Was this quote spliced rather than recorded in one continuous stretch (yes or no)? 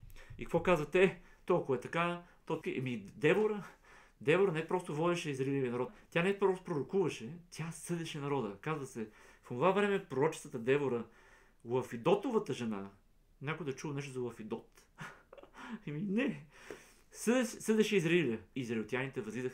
yes